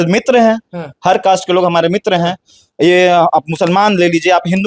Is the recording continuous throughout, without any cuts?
yes; 0 cuts

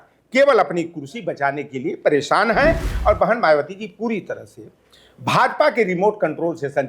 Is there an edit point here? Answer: yes; 1 cut; at 2.9 s

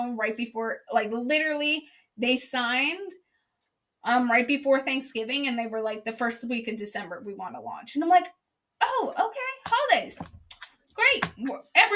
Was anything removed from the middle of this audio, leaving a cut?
no; 0 cuts

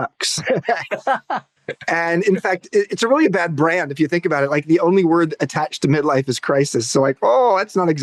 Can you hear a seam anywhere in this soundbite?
no; 0 cuts

